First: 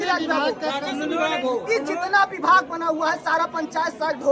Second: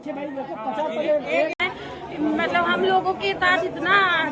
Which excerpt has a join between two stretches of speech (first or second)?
second